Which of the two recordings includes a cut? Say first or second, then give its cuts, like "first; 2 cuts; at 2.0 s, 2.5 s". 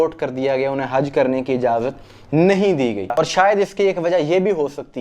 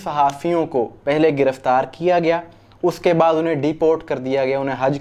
first; 1 cut; at 3.1 s